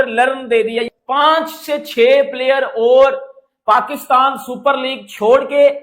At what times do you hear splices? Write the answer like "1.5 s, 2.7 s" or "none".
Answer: 0.9 s